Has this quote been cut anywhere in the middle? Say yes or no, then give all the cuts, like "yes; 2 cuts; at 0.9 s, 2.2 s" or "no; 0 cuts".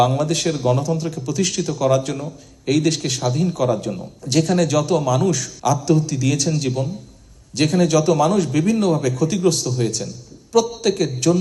no; 0 cuts